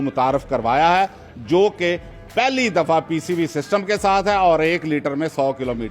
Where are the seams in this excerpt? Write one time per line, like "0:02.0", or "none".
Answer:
none

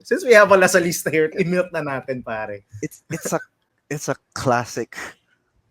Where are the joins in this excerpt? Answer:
0:01.3

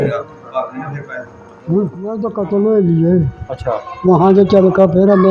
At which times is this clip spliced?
0:02.3

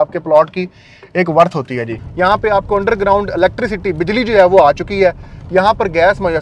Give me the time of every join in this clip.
0:02.0

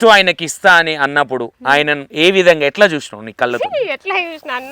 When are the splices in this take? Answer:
0:02.1
0:02.7

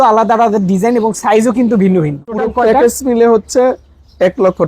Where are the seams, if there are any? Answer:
0:02.5

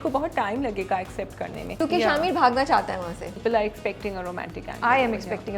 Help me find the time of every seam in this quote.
0:01.8
0:03.4

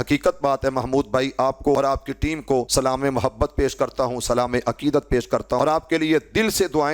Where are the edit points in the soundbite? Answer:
0:01.8
0:02.7
0:05.6

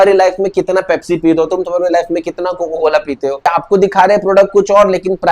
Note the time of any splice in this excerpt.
0:03.4

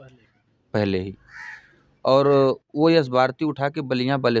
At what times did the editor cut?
none

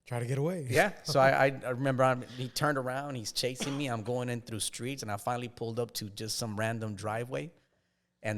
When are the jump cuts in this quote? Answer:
none

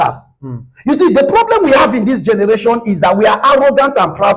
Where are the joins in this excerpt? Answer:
none

